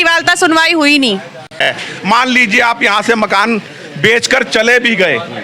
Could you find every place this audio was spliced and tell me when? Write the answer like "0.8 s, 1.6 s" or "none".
1.6 s